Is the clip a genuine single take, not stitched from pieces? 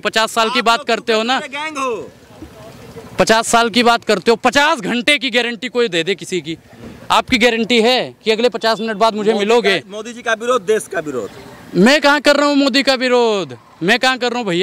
yes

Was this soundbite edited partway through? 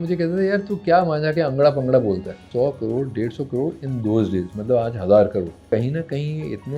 yes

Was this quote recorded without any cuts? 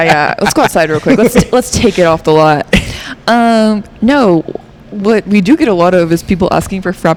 yes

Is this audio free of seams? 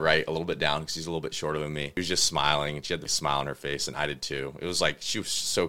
no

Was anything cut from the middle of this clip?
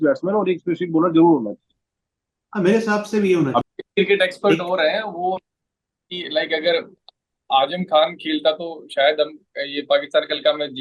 yes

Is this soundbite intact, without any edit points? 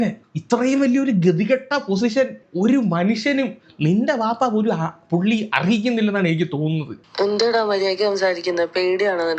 no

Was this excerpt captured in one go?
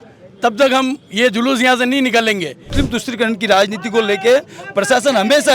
no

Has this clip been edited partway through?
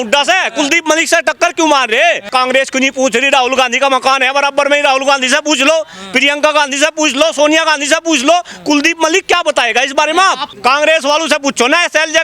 yes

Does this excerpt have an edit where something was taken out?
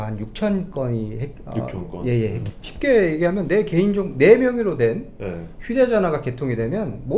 yes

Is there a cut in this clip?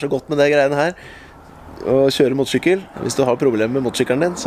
yes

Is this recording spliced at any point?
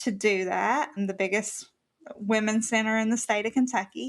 yes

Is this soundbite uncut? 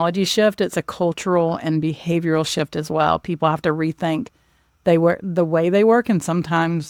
yes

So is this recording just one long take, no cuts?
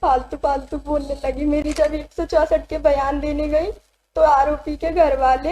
no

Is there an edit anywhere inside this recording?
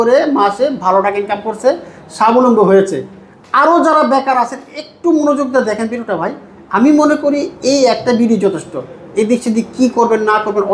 no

